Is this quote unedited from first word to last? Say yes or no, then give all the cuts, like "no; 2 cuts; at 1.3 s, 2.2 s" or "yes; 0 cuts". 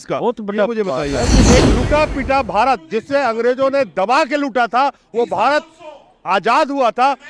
no; 1 cut; at 1.5 s